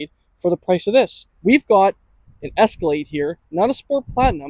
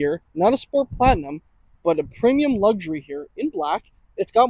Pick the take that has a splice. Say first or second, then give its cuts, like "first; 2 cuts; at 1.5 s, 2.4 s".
first; 1 cut; at 1.2 s